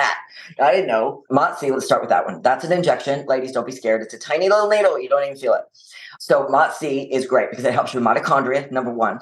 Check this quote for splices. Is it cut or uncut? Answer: cut